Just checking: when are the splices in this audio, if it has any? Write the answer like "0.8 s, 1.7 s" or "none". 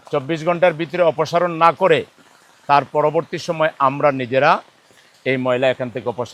none